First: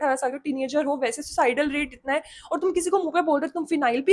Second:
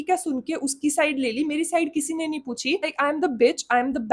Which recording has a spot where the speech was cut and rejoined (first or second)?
second